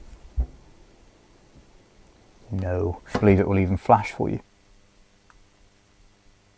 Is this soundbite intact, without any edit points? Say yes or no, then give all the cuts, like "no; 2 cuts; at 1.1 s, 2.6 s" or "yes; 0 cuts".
no; 1 cut; at 3.0 s